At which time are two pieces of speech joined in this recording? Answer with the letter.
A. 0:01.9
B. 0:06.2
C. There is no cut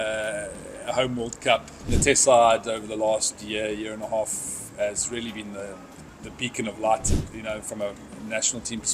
A